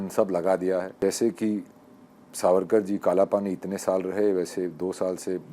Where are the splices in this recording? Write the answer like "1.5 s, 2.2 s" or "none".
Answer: 1.0 s